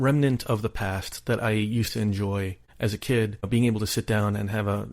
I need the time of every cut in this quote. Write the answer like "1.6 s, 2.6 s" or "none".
2.6 s